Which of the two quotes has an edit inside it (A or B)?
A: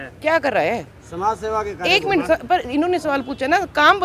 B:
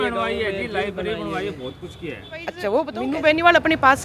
B